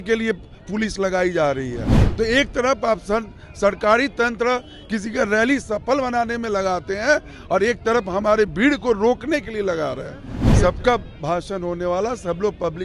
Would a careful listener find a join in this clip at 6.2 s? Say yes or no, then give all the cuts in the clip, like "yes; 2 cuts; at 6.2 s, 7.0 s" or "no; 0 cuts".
no; 1 cut; at 10.4 s